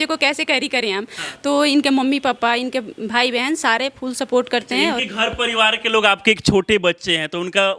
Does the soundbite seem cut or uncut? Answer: uncut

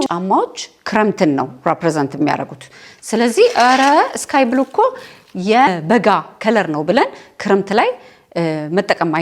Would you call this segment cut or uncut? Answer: cut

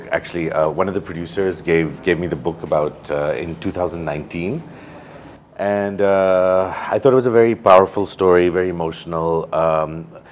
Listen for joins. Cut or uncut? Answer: uncut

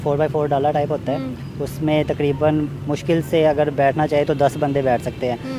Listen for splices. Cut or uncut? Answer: uncut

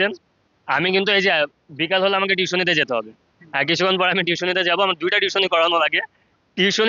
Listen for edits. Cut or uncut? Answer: uncut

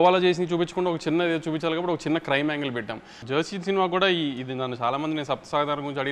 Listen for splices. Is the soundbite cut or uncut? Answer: cut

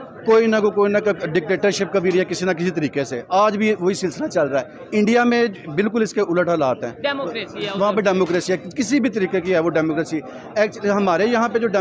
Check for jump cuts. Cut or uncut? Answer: uncut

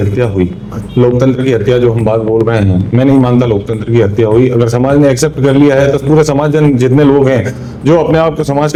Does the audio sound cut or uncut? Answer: uncut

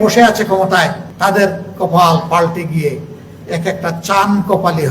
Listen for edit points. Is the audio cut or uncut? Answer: cut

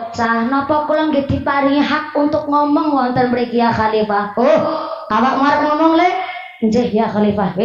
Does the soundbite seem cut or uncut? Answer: uncut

